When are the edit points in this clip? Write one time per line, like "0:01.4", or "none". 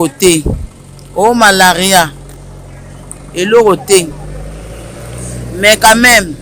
none